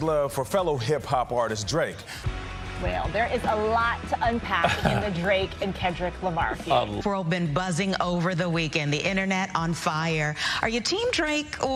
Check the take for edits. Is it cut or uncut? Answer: uncut